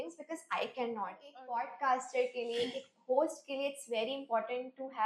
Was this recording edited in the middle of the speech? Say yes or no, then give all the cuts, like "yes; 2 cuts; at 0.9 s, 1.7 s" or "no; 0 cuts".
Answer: yes; 1 cut; at 1.3 s